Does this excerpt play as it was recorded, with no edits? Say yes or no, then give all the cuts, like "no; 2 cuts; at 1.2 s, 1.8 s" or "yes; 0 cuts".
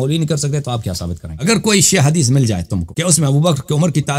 no; 2 cuts; at 1.3 s, 2.8 s